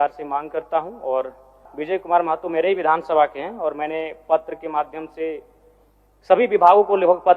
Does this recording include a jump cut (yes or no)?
yes